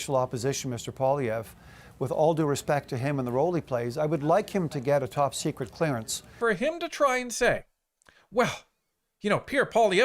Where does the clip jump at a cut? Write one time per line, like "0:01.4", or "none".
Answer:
0:06.4